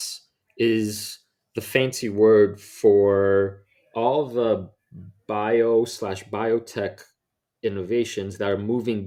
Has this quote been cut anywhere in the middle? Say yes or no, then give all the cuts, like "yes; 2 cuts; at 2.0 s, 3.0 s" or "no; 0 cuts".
no; 0 cuts